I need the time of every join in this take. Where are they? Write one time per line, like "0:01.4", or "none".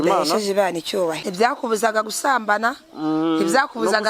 0:01.2

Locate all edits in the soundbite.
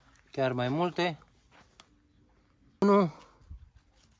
0:02.8

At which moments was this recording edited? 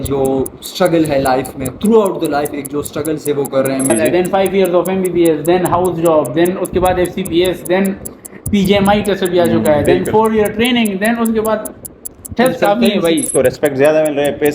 0:03.9
0:13.3

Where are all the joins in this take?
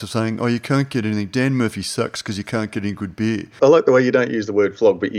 0:03.5

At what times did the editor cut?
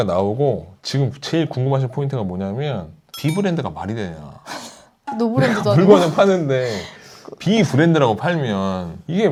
none

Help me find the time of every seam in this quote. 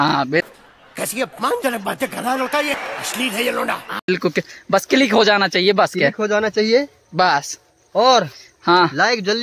none

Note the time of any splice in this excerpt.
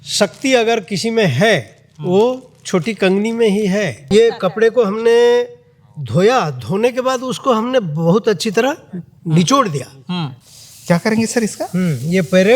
0:04.0
0:10.3

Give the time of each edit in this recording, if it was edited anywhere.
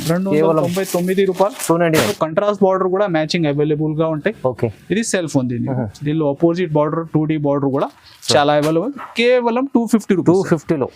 0:02.1

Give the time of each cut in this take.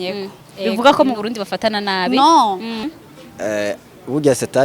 0:02.8

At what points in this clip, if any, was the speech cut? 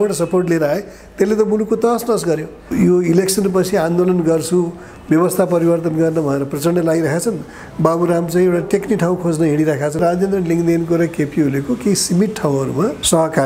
0:02.6
0:10.0

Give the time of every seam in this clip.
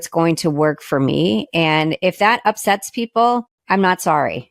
0:03.5

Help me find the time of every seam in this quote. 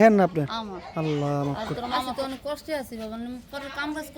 0:01.4

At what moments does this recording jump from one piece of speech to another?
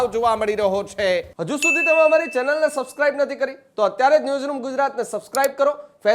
0:01.3

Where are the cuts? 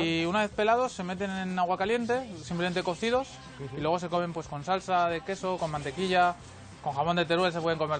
none

